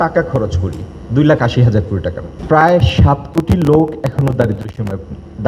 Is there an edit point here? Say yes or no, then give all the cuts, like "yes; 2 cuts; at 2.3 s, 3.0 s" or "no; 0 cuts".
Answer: yes; 1 cut; at 2.3 s